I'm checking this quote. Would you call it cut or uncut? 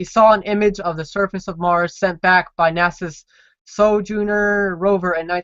uncut